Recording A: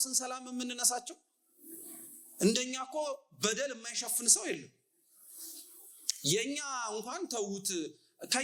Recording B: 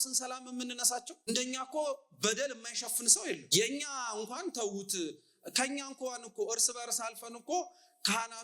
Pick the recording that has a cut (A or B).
B